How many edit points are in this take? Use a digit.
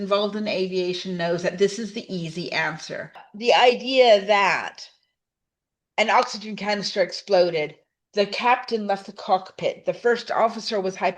1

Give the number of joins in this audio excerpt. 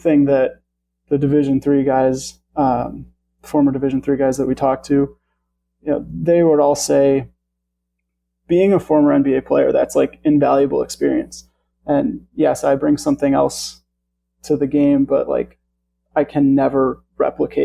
0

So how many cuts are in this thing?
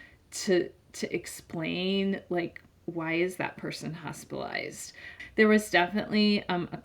1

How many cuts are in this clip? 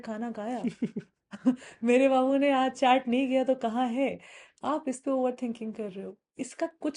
0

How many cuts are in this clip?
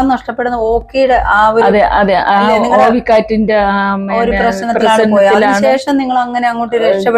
0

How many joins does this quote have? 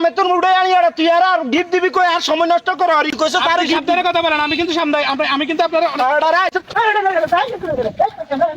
1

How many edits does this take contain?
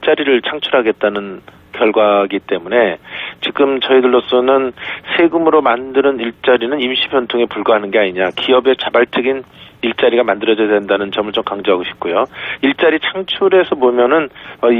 1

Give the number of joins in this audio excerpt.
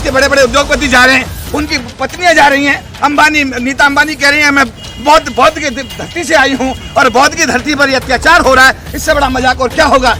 0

